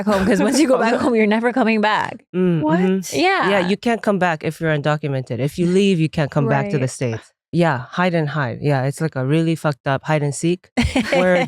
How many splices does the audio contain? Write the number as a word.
one